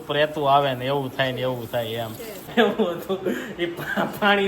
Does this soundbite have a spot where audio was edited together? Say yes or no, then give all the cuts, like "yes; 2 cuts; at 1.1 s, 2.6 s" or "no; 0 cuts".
yes; 1 cut; at 2.5 s